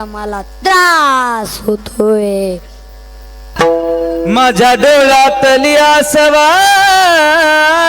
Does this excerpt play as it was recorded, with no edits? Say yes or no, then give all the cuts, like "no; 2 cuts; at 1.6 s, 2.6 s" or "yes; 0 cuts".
no; 1 cut; at 3.4 s